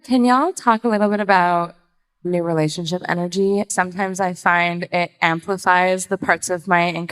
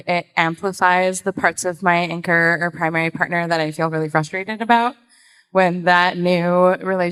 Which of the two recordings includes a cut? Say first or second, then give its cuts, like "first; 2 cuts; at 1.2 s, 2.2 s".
first; 2 cuts; at 2.3 s, 3.7 s